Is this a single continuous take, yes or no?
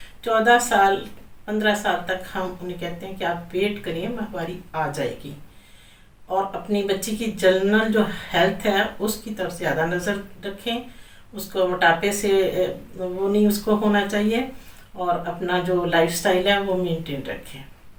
yes